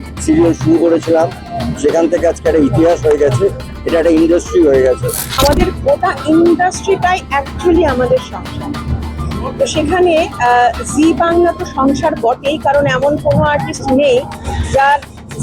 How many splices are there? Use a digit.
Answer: 1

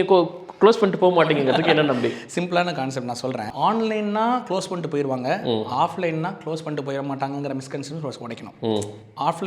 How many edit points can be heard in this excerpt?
0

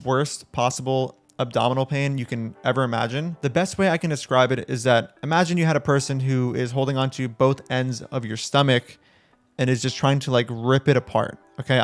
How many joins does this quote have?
0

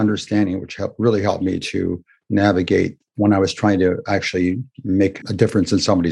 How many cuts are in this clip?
1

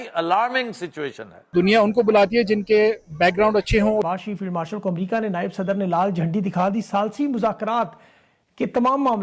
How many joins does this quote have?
1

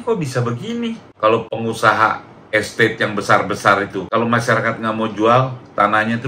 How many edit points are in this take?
1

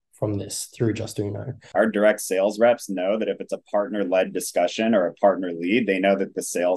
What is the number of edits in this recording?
1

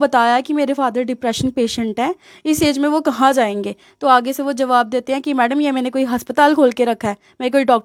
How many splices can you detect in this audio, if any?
0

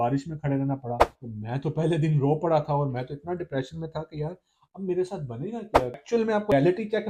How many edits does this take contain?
2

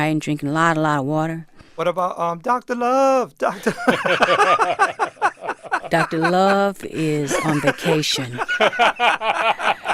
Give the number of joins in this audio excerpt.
1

